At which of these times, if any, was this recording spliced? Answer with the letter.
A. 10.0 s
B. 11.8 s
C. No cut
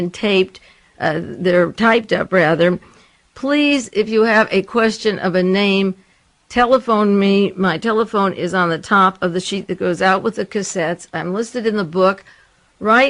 C